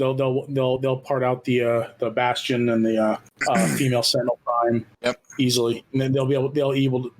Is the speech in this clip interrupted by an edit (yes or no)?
yes